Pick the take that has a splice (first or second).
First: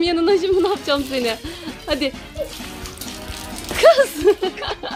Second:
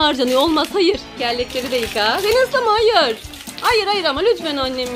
second